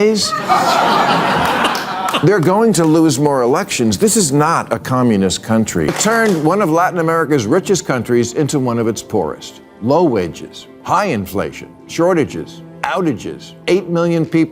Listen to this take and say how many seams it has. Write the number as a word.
one